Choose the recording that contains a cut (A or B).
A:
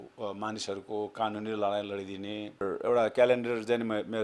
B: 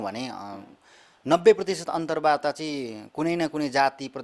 A